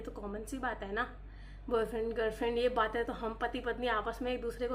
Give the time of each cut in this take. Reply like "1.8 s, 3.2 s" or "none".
none